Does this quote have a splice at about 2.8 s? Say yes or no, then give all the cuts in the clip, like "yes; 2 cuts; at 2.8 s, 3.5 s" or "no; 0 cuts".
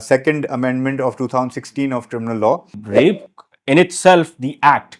yes; 1 cut; at 2.8 s